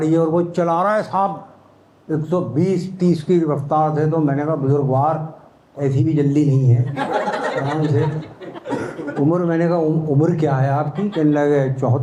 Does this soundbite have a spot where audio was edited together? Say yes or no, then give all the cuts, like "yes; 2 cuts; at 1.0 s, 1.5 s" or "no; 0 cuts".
no; 0 cuts